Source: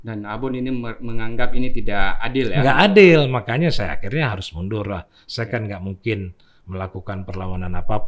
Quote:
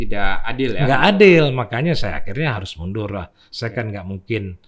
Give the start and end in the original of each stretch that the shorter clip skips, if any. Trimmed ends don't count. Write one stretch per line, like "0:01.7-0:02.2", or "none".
none